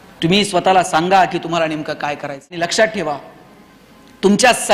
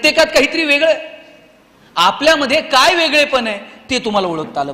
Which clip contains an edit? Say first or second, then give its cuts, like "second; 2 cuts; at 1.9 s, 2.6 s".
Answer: first; 1 cut; at 2.6 s